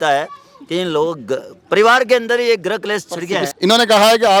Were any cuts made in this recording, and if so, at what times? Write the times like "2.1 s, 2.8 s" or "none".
3.4 s